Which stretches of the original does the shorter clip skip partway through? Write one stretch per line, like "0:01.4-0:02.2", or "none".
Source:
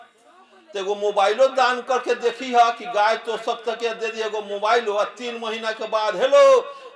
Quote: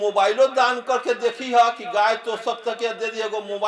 none